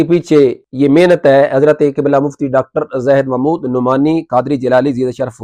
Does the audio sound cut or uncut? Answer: uncut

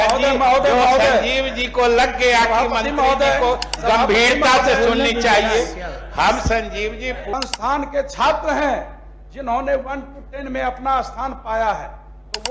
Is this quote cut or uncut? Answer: cut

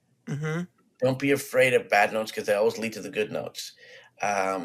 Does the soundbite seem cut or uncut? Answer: uncut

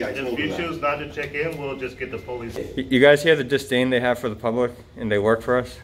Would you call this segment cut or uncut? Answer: cut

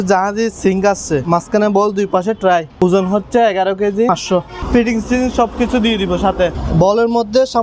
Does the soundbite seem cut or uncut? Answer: cut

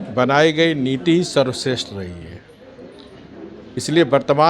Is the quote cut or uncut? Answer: uncut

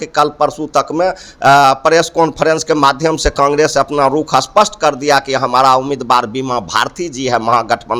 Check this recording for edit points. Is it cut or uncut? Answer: uncut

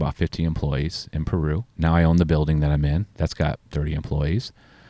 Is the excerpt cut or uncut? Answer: cut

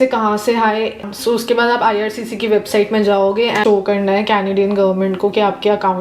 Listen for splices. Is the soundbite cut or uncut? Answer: cut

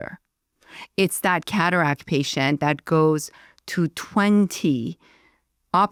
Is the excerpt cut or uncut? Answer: uncut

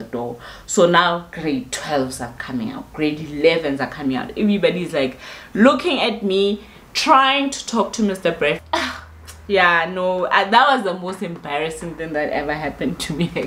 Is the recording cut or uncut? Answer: cut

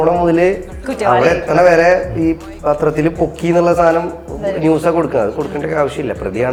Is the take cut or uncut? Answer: uncut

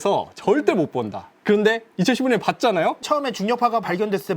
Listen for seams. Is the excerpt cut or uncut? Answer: cut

